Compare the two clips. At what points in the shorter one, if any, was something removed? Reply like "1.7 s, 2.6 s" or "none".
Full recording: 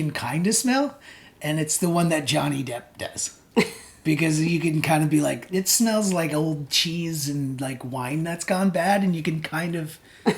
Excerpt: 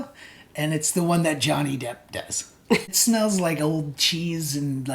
3.0 s